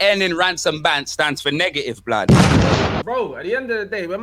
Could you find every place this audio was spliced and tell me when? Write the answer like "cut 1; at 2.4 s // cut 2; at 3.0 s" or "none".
cut 1; at 3.0 s